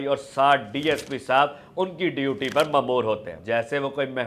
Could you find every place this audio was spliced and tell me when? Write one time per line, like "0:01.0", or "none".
0:03.4